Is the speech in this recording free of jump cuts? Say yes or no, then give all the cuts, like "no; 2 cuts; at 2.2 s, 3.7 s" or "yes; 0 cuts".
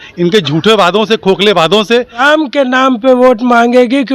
no; 1 cut; at 2.2 s